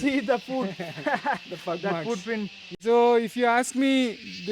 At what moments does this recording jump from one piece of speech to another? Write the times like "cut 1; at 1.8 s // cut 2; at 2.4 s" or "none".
cut 1; at 2.7 s